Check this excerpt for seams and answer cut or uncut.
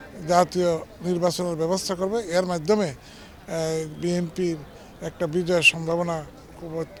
uncut